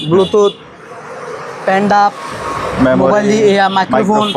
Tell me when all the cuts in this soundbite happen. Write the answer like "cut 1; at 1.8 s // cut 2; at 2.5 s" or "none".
none